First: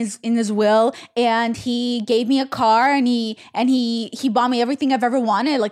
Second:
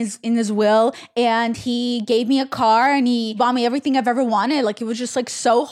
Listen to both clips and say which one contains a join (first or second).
second